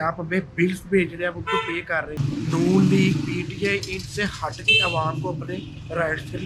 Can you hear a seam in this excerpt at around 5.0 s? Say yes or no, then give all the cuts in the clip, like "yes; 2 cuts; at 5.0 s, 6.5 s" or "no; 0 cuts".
no; 1 cut; at 2.2 s